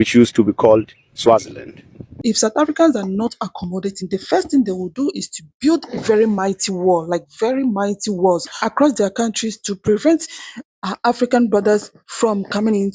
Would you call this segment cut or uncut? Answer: cut